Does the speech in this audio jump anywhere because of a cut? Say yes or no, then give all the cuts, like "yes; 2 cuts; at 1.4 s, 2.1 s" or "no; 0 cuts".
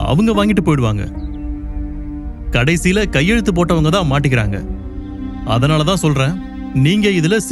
no; 0 cuts